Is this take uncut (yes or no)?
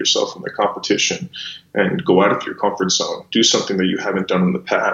yes